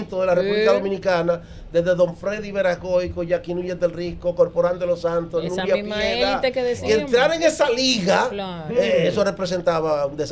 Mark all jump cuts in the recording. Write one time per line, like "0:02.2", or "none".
none